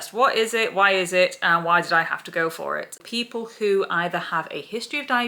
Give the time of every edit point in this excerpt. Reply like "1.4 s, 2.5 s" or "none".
3.0 s